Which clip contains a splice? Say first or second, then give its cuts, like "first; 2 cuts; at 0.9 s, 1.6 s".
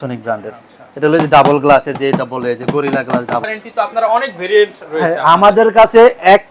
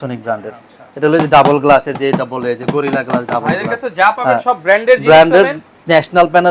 first; 1 cut; at 3.4 s